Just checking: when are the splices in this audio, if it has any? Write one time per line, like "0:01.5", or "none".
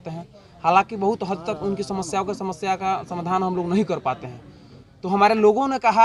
none